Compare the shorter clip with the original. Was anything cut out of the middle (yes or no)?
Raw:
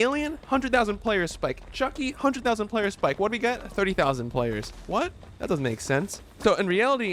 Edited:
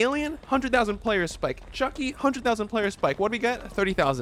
no